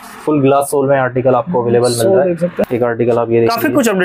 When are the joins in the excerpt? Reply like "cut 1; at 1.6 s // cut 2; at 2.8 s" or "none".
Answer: cut 1; at 2.7 s